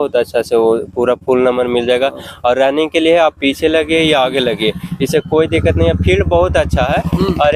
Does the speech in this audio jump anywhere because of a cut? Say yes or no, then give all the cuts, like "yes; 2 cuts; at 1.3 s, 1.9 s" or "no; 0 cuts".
no; 0 cuts